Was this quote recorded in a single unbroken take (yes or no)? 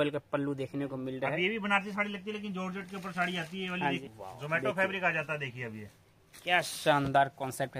no